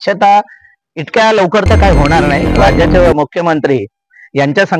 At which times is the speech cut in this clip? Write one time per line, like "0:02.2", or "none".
0:02.6